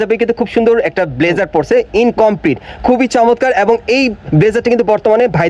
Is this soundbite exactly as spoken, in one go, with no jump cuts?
yes; 0 cuts

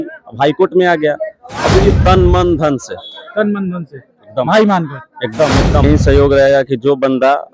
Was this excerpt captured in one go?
no; 2 cuts; at 2.0 s, 5.8 s

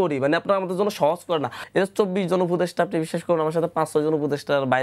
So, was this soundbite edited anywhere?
yes; 1 cut; at 1.6 s

